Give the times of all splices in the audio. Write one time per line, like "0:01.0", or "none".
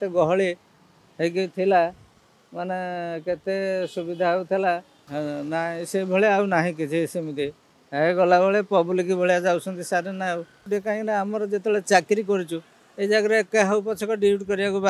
0:05.0
0:10.7